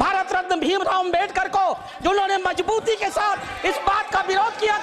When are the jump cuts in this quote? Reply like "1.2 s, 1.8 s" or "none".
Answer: none